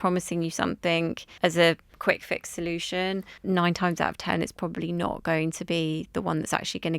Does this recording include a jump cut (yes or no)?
yes